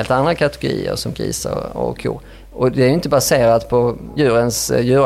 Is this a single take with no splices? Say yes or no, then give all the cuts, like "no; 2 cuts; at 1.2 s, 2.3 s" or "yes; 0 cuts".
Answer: no; 1 cut; at 4.0 s